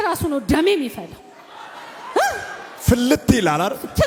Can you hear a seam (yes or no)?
no